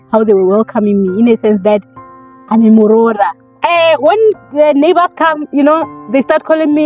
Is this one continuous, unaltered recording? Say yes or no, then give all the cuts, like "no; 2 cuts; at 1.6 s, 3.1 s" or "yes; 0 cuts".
no; 1 cut; at 3.4 s